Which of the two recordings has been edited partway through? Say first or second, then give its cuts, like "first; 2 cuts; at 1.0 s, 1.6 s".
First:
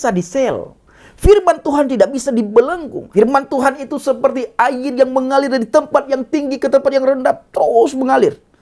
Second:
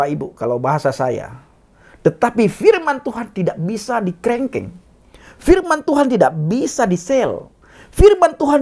first; 1 cut; at 2.9 s